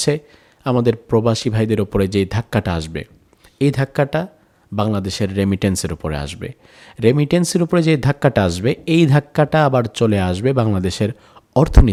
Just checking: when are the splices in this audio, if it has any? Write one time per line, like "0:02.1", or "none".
none